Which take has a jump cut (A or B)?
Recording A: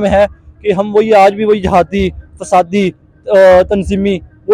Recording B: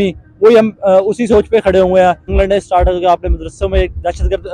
B